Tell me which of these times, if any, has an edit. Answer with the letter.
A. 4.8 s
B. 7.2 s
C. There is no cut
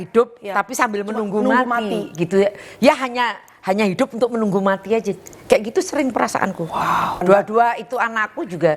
B